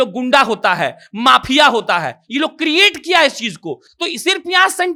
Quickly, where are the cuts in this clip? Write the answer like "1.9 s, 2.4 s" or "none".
none